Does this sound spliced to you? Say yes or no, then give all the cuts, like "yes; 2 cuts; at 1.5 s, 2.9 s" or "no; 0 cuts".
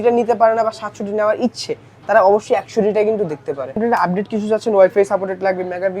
yes; 1 cut; at 3.8 s